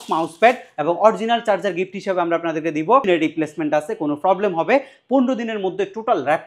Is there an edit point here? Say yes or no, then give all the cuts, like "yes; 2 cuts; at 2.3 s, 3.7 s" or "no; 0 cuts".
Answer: yes; 1 cut; at 3.0 s